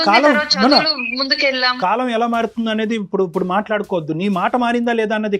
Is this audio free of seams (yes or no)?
no